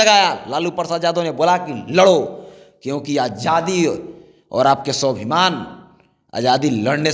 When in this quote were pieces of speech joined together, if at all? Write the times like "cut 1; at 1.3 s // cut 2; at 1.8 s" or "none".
none